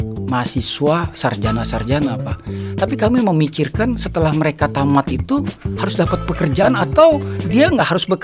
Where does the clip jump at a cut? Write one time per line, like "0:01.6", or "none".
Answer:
0:07.3